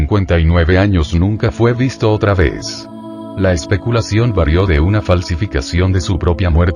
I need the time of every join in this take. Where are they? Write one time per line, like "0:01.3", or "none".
0:03.3